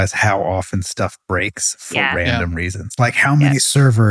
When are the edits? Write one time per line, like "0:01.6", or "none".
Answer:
none